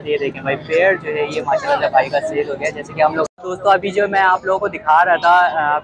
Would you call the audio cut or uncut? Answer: cut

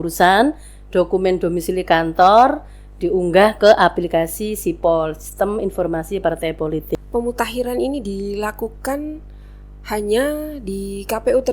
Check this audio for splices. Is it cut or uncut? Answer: cut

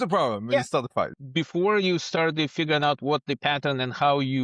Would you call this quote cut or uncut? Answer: cut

